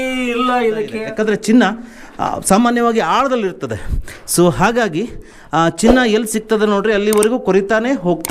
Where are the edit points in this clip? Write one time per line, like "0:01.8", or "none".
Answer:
0:01.0